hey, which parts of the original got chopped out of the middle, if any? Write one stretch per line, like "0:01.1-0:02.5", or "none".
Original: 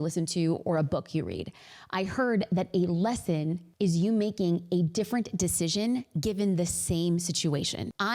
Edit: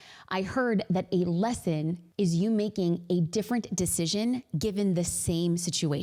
none